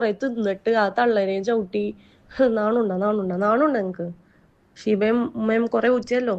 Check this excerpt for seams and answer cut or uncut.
uncut